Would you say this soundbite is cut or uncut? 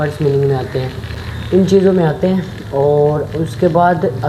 uncut